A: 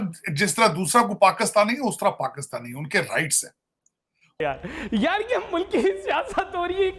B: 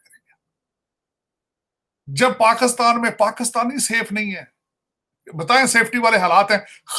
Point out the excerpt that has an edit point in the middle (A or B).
A